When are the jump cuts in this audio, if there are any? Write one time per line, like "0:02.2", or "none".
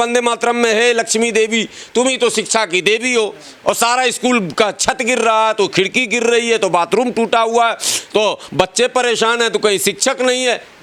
none